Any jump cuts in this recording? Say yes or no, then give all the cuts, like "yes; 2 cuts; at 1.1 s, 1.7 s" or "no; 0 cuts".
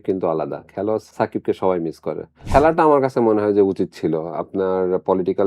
yes; 2 cuts; at 1.1 s, 2.4 s